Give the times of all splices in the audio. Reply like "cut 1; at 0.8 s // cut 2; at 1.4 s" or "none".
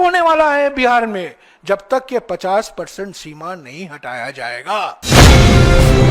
cut 1; at 5.0 s